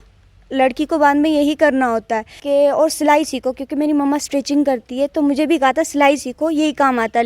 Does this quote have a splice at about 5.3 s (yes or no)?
no